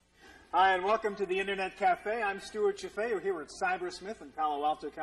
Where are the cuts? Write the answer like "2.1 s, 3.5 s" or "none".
3.0 s